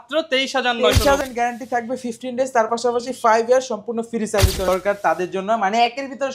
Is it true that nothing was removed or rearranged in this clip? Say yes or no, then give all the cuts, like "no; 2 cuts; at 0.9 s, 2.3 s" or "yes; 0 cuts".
no; 2 cuts; at 1.2 s, 4.7 s